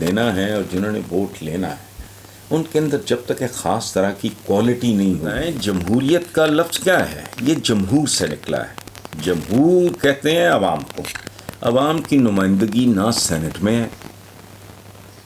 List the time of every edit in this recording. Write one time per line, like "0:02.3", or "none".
0:05.5

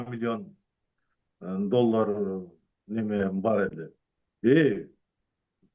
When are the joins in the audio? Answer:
none

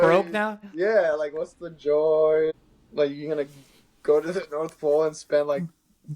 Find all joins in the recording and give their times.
0:02.5

